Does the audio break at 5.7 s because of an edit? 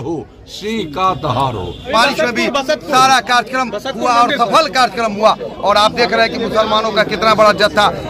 no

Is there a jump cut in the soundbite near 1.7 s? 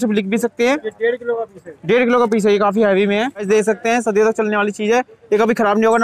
no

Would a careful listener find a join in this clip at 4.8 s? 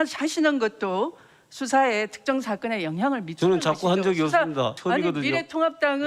yes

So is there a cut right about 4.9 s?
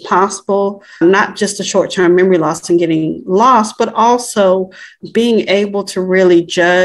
yes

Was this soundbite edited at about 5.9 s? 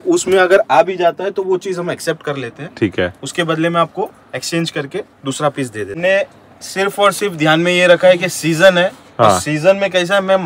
yes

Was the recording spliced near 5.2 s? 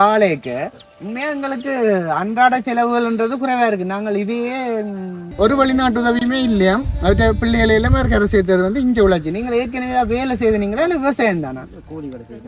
yes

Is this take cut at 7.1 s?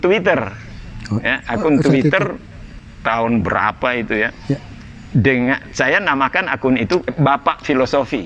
yes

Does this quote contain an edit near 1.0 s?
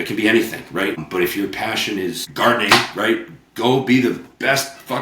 yes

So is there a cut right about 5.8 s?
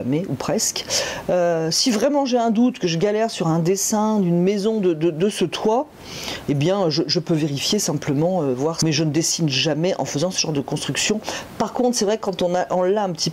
no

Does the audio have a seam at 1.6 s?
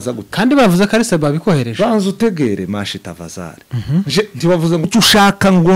no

